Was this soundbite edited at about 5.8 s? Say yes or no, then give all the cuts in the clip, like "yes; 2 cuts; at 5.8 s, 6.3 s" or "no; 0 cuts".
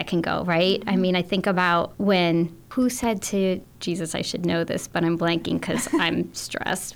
no; 3 cuts; at 1.9 s, 2.6 s, 3.7 s